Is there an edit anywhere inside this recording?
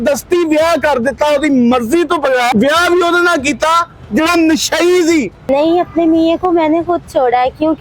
yes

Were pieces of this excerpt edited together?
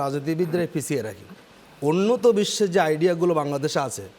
no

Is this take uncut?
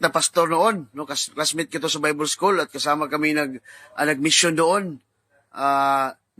no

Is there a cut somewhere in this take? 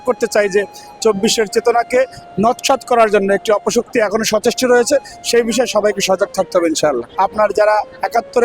yes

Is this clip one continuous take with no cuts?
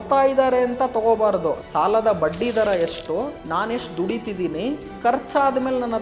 no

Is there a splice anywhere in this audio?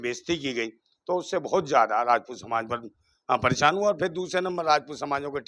no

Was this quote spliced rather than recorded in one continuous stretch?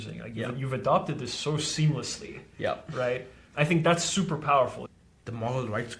yes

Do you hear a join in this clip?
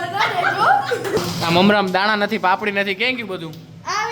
yes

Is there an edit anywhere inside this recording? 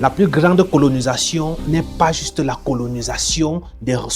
no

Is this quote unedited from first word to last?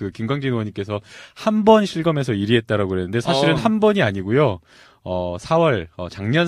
no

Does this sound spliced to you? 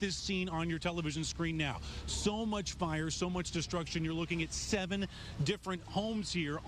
no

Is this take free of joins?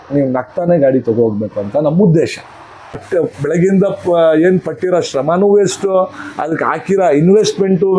no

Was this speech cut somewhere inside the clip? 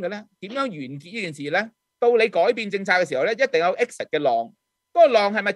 yes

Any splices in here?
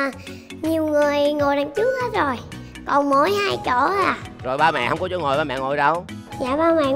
yes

